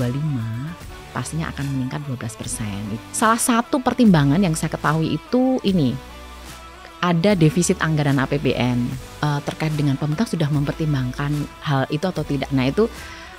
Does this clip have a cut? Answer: yes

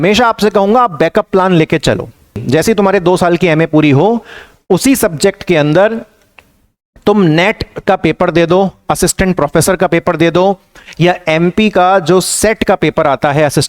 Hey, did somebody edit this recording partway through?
yes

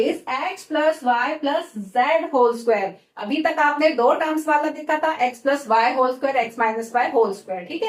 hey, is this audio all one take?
yes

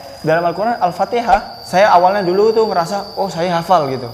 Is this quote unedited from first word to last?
no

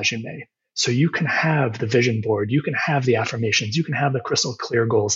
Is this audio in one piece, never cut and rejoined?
yes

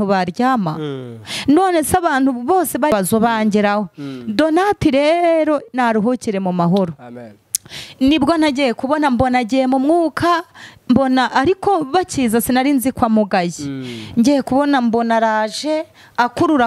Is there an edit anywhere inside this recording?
yes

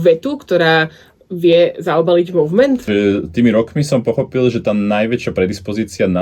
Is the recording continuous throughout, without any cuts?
no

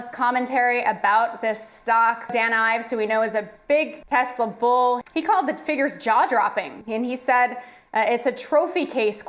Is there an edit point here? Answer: yes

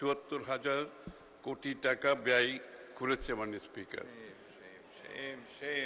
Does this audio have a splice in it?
no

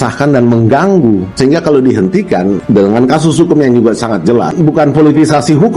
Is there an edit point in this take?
yes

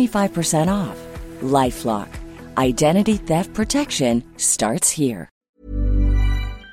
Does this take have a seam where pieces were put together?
yes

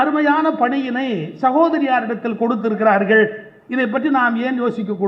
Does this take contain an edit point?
no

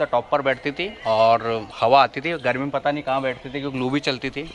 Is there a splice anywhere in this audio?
no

